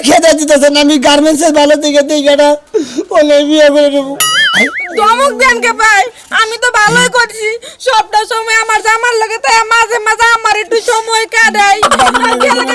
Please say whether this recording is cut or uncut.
cut